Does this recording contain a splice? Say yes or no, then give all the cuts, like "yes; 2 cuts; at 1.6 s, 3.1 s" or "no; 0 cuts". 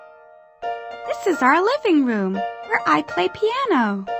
yes; 1 cut; at 1.1 s